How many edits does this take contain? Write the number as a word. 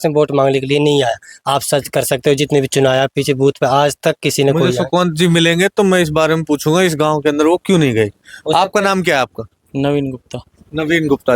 zero